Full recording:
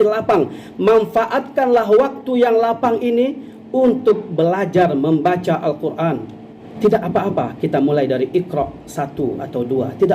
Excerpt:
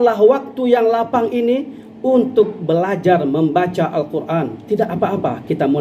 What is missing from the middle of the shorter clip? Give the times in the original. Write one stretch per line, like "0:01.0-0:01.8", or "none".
0:06.3-0:06.7